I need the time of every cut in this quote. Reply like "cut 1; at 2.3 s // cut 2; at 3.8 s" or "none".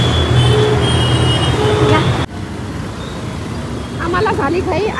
none